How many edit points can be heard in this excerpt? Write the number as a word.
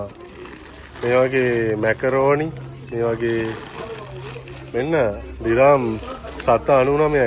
zero